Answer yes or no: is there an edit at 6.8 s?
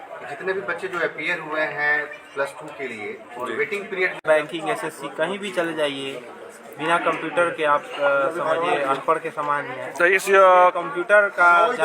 no